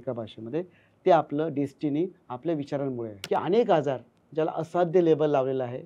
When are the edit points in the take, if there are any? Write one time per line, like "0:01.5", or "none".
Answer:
0:03.2